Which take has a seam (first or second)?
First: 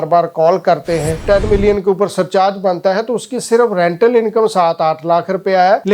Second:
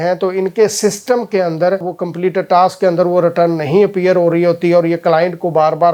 first